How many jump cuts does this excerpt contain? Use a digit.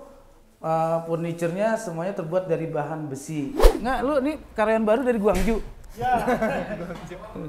1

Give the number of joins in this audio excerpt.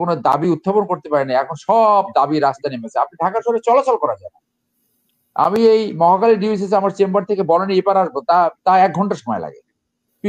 0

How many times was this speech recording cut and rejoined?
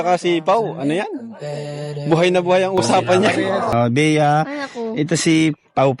1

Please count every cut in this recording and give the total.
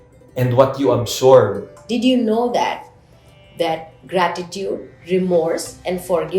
1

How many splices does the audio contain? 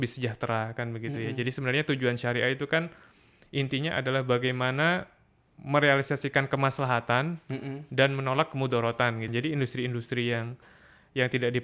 1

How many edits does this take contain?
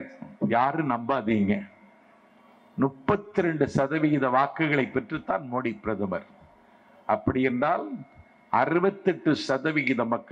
0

